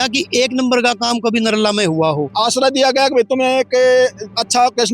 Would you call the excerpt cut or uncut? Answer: cut